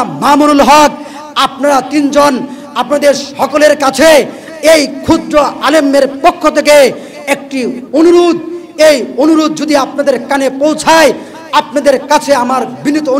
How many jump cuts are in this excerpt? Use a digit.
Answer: 0